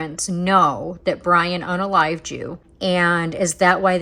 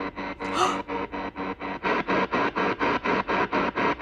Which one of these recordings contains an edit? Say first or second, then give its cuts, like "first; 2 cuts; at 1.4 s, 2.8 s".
first; 1 cut; at 2.6 s